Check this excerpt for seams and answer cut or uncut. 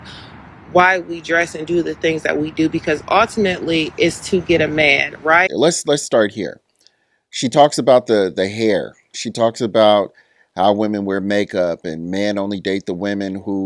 cut